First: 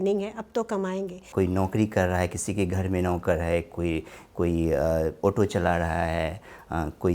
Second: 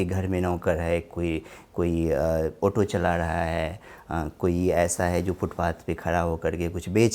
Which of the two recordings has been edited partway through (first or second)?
first